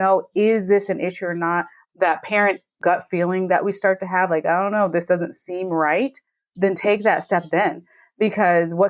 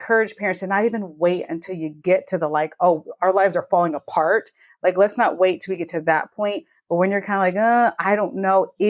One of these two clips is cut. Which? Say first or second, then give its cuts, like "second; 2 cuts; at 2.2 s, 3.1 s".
first; 1 cut; at 2.8 s